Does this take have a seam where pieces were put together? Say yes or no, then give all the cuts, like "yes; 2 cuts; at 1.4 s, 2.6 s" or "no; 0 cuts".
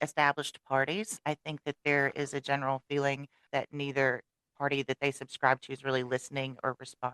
yes; 2 cuts; at 1.2 s, 3.4 s